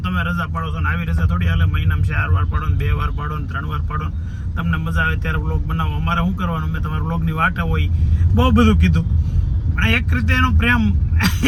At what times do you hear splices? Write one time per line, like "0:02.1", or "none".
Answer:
none